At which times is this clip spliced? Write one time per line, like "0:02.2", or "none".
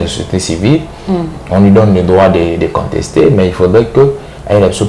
none